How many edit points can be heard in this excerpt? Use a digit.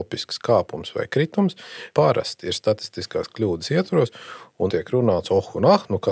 2